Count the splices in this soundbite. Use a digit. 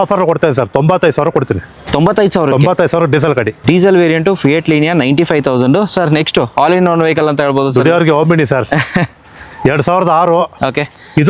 0